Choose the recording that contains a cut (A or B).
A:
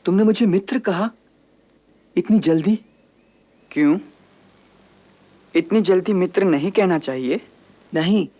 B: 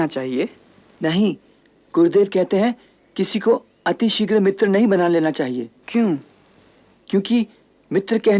B